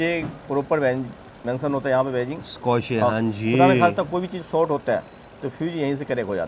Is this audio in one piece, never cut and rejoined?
yes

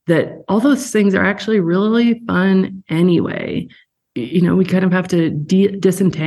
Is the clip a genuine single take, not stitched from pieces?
no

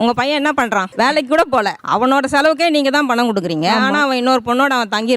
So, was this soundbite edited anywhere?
yes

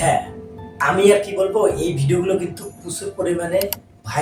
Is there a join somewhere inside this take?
no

